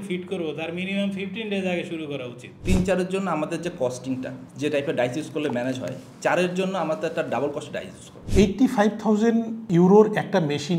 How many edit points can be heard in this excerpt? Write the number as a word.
two